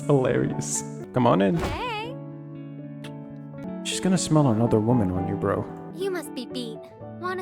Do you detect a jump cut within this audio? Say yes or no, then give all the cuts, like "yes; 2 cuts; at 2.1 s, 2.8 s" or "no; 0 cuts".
yes; 2 cuts; at 0.9 s, 3.6 s